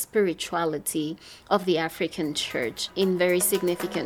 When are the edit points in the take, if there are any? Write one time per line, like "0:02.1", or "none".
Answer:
0:02.8